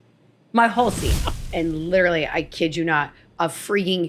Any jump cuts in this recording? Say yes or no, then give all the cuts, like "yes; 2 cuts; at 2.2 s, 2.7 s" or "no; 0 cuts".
yes; 1 cut; at 1.4 s